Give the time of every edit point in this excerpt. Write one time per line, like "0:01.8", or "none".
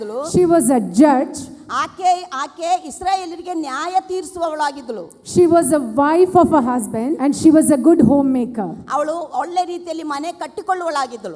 0:07.2